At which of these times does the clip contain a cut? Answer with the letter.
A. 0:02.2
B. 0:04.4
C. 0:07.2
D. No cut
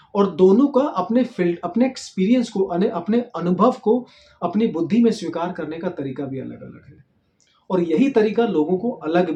D